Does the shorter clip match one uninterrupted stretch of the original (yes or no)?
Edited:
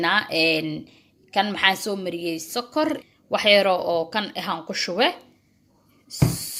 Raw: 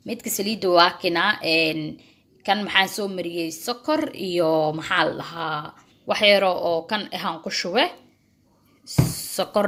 no